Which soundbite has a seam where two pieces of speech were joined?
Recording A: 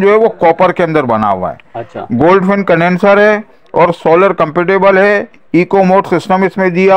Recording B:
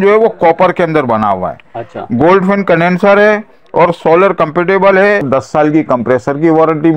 B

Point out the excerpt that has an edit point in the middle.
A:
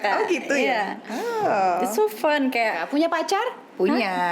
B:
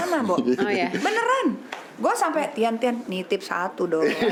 A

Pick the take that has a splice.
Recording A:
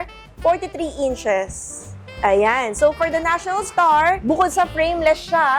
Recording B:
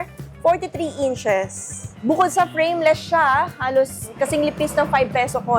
B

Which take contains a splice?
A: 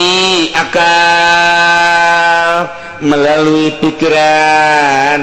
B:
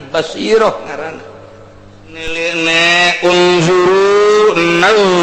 B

